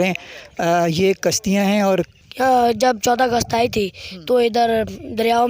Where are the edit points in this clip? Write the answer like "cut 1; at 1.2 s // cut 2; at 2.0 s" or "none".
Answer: cut 1; at 2.2 s